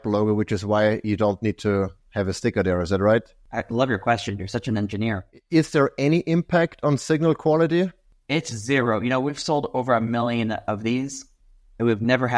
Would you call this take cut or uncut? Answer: cut